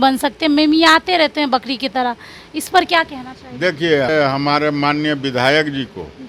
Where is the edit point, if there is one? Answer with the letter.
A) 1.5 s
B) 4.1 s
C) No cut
B